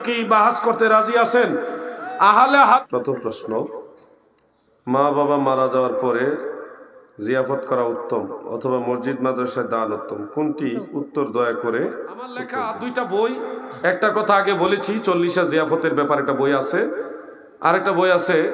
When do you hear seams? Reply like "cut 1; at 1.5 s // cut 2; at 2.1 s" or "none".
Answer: cut 1; at 2.8 s // cut 2; at 12.5 s